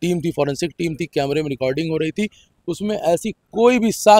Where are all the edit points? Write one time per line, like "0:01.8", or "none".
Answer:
none